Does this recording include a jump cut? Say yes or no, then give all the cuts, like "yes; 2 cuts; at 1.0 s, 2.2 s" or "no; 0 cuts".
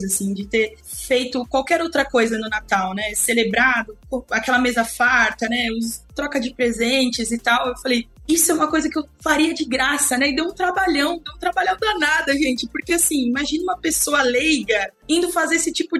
no; 0 cuts